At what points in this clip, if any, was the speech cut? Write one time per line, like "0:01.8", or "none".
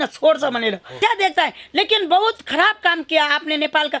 0:01.0